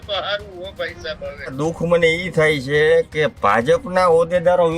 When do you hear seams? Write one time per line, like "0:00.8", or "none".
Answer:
0:01.6